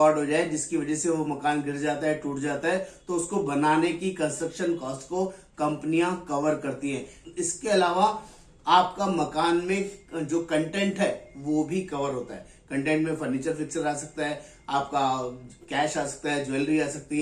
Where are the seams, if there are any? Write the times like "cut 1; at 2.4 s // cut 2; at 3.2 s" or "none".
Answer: cut 1; at 7.2 s